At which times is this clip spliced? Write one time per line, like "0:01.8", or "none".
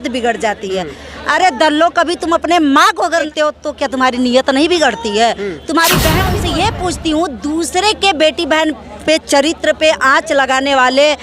0:03.3
0:06.3